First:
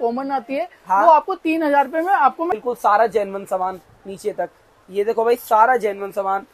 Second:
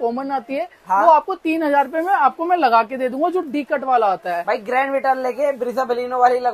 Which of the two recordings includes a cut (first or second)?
first